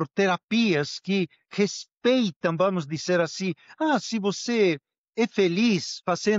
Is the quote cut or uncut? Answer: uncut